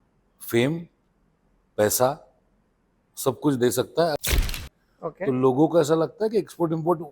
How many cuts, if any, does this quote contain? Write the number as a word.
one